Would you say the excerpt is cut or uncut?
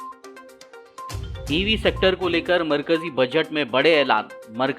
cut